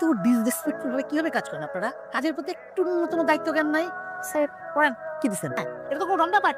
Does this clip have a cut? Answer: yes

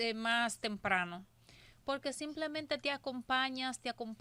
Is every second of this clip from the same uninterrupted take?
yes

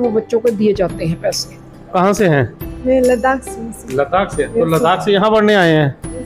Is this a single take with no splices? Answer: no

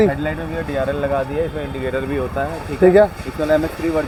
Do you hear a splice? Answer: no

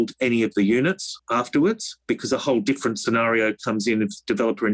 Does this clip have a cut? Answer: yes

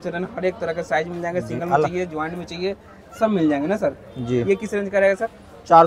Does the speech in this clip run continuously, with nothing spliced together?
yes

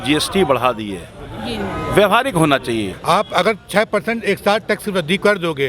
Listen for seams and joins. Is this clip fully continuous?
no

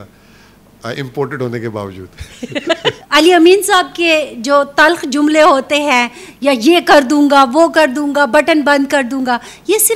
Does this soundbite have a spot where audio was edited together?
yes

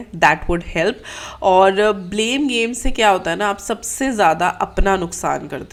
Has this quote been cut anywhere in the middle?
no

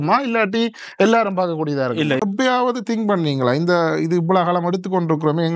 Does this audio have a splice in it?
yes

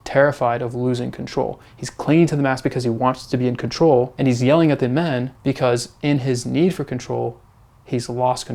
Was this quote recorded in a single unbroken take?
no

